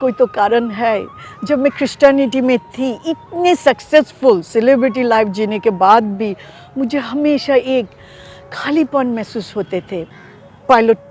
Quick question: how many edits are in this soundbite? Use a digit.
1